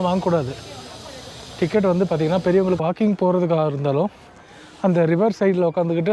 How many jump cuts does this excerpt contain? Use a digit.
1